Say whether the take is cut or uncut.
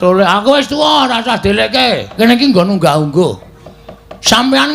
cut